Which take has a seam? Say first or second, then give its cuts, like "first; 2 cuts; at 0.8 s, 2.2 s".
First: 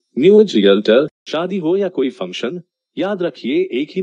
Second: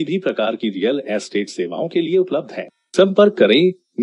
first; 1 cut; at 1.2 s